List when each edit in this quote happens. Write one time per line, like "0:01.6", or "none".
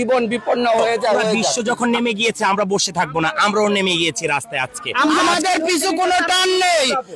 0:01.5
0:05.2